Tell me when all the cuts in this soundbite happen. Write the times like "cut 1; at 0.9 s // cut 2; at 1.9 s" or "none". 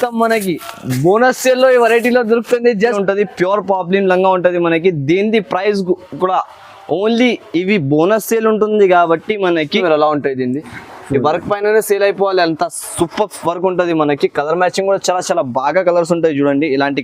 cut 1; at 3.0 s // cut 2; at 9.7 s